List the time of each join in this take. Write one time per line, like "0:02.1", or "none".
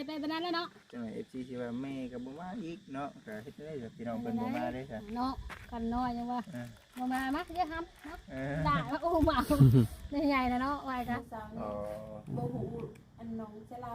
0:11.1